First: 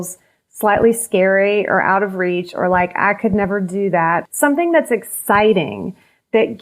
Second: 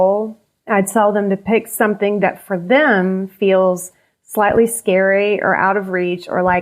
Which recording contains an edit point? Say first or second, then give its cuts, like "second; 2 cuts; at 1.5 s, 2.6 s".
first; 1 cut; at 4.2 s